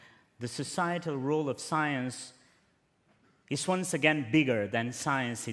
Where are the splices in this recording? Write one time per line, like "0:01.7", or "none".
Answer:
0:04.3

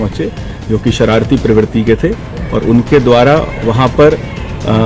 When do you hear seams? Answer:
none

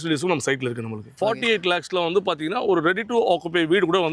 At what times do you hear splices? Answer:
0:01.1

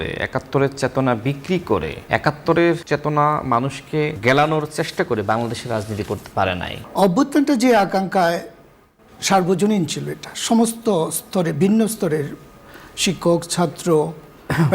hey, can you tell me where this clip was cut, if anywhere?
0:02.0
0:02.8
0:04.2
0:06.8

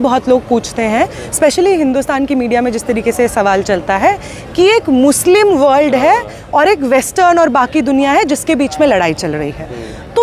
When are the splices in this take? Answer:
none

